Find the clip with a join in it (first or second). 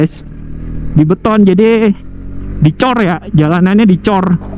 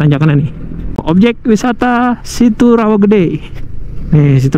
second